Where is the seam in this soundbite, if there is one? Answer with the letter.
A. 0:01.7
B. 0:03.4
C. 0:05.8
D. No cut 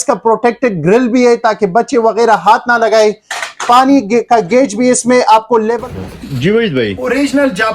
C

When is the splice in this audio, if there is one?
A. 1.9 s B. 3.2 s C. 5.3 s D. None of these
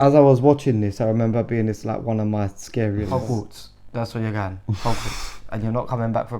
B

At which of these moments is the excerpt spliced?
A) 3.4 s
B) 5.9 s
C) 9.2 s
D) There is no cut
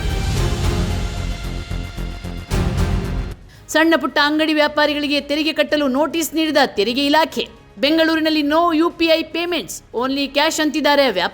A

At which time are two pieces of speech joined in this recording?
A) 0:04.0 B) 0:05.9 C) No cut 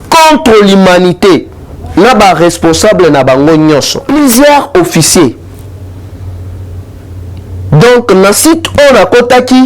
A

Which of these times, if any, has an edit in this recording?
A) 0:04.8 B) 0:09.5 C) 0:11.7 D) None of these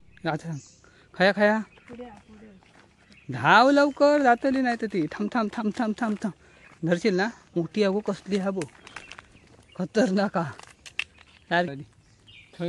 C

